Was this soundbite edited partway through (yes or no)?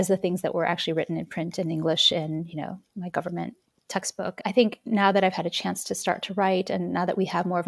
no